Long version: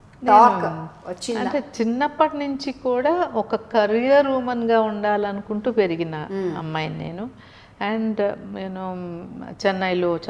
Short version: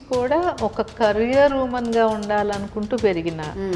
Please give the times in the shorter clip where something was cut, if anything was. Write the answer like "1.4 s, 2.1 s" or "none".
none